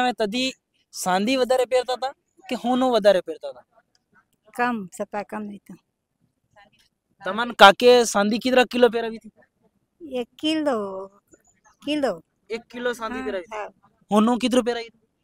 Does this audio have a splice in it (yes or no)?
no